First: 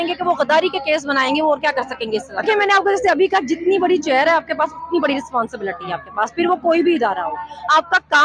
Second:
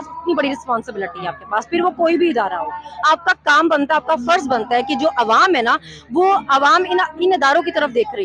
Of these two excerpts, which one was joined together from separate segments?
first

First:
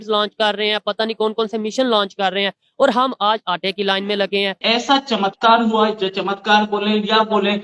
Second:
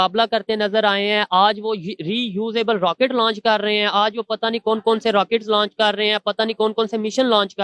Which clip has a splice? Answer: first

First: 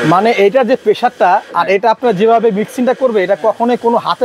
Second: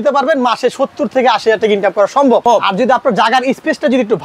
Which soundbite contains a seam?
second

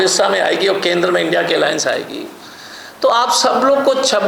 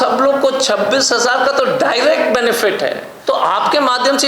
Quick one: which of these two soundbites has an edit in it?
second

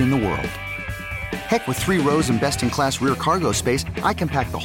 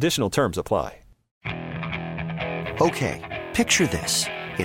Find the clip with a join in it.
second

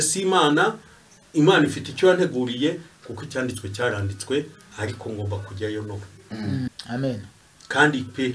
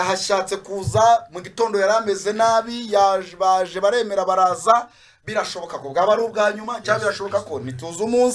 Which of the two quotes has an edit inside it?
first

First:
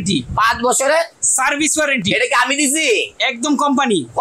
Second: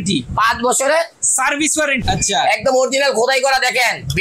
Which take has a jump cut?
second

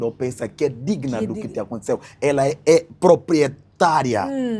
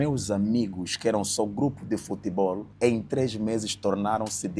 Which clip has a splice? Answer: second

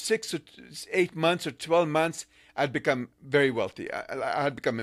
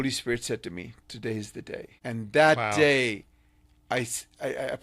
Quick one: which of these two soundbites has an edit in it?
second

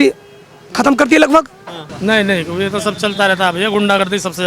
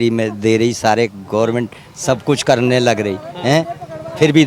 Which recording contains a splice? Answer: first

